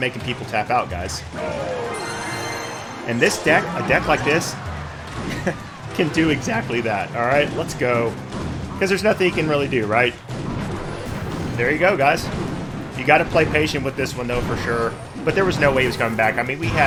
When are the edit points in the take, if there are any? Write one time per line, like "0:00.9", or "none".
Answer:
none